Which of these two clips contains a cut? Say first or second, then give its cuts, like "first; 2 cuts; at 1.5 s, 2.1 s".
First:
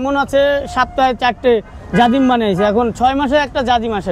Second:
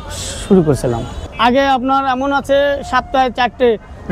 second; 1 cut; at 1.2 s